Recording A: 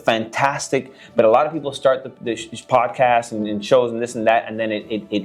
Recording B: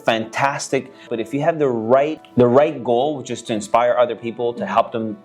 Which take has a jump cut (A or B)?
B